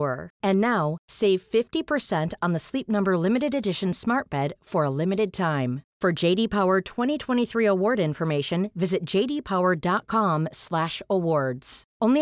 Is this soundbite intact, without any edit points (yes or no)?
yes